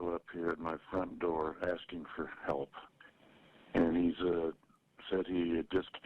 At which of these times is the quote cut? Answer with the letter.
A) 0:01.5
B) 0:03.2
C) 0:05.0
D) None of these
B